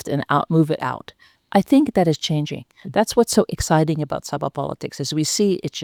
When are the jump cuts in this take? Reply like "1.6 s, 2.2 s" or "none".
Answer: none